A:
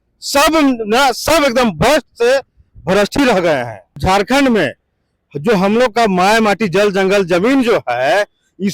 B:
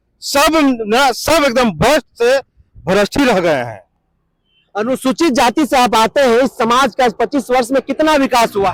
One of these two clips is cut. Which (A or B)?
A